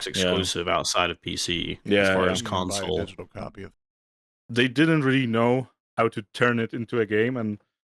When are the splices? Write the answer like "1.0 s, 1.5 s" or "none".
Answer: 3.8 s